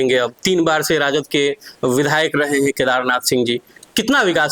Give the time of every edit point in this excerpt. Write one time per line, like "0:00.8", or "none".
none

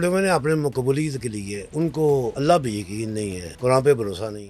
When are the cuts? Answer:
0:01.6
0:02.3
0:03.4

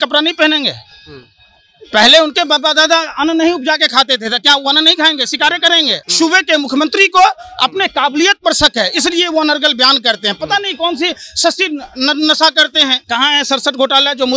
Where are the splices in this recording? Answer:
0:06.0
0:13.0

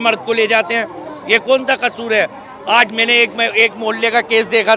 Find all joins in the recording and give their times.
none

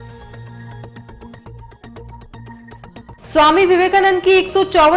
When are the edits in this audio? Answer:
0:02.9

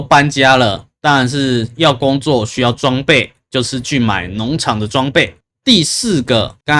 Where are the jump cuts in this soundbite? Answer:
none

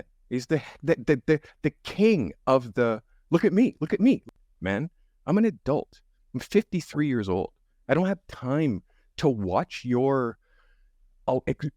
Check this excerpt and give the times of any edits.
0:04.4

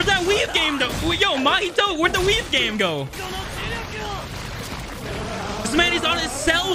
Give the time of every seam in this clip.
0:03.2

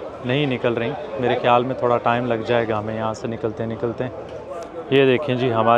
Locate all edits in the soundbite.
0:04.5

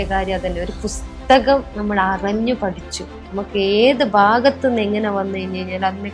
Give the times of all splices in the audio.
0:03.2

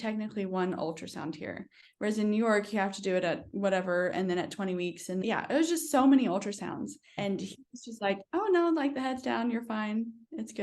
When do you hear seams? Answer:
0:05.2
0:07.1

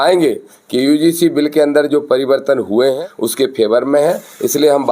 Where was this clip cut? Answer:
0:02.9

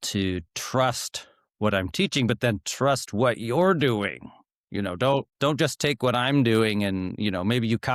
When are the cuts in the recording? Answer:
0:05.3

